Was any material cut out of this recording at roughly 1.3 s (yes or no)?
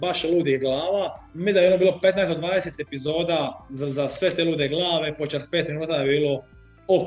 yes